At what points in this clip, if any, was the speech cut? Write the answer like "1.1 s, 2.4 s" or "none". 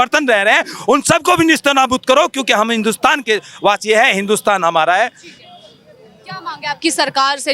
none